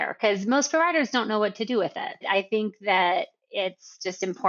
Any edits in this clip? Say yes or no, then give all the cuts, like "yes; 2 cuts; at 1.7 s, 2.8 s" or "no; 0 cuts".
no; 0 cuts